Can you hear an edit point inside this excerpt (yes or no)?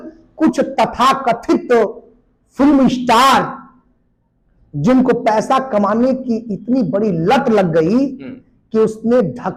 no